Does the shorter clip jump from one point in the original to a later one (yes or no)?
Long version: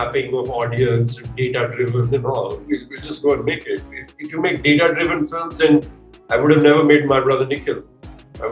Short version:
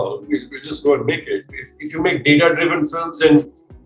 no